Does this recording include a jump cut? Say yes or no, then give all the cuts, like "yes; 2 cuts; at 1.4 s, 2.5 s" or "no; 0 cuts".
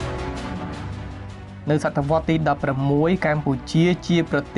yes; 1 cut; at 1.5 s